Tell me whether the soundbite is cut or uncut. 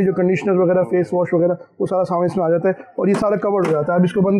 uncut